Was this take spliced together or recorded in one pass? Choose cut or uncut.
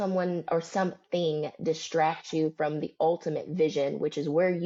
uncut